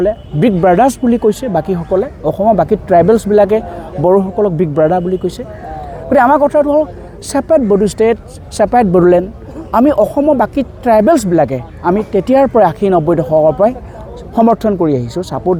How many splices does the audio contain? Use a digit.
0